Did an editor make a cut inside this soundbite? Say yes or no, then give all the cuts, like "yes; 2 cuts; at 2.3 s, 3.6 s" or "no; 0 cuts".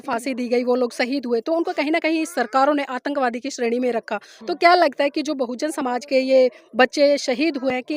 no; 0 cuts